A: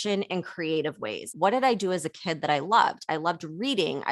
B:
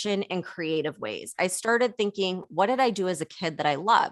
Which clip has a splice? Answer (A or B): A